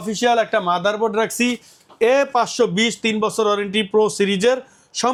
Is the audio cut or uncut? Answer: uncut